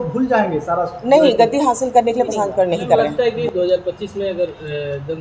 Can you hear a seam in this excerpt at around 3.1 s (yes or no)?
yes